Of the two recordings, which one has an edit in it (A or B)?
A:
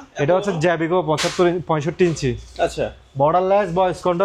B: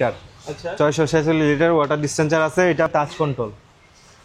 B